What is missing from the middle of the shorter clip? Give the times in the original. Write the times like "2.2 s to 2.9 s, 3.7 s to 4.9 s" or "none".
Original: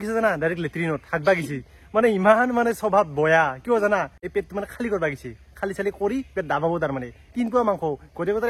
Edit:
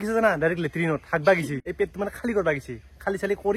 1.6 s to 4.2 s

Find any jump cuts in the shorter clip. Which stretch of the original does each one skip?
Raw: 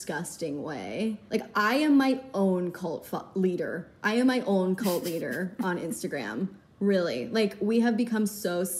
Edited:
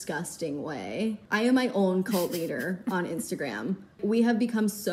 1.2 s to 3.9 s, 6.7 s to 7.5 s

